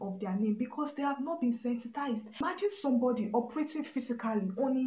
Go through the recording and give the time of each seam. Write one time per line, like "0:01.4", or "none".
0:02.3